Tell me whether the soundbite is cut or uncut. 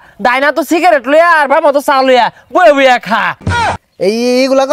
cut